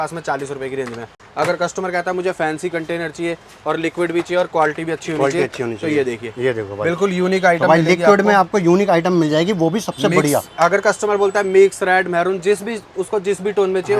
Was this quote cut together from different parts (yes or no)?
no